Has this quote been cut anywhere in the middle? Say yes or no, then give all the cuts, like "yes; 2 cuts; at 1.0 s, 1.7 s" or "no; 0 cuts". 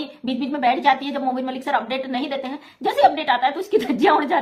no; 0 cuts